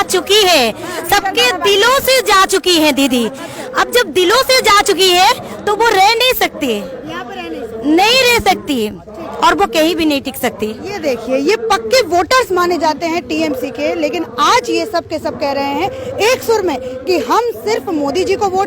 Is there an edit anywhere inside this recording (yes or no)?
no